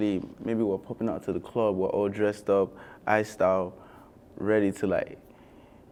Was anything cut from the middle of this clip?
no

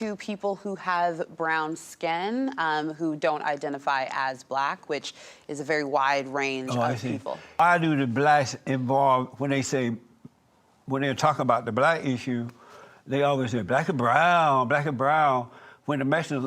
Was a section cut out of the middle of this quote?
yes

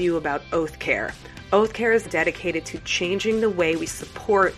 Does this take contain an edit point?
yes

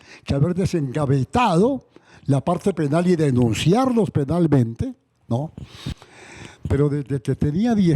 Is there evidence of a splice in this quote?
yes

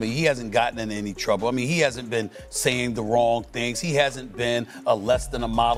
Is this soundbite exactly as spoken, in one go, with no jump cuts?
yes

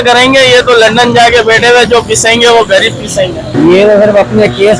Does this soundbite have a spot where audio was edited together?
yes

